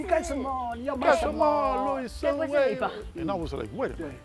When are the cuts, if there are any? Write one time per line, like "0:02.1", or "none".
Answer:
0:03.1